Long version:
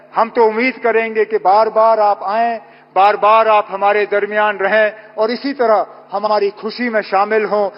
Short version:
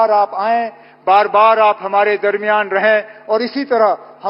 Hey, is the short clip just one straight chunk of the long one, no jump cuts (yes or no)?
yes